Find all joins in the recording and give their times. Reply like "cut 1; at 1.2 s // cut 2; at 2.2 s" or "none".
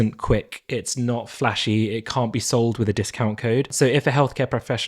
cut 1; at 3.7 s